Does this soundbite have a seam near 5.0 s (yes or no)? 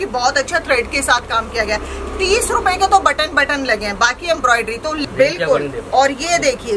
yes